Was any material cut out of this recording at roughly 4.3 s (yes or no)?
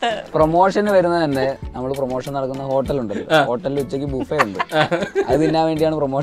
no